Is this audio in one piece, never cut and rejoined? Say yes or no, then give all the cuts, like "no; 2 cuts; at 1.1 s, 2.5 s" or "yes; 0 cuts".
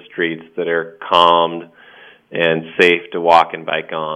yes; 0 cuts